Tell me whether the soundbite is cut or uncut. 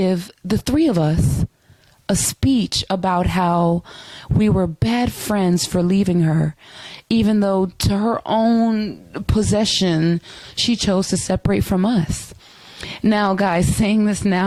uncut